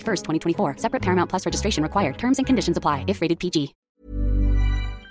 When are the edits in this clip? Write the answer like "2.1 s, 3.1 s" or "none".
3.8 s